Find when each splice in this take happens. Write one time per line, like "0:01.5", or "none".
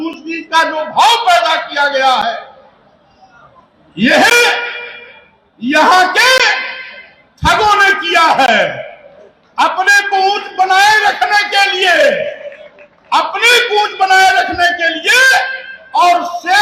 none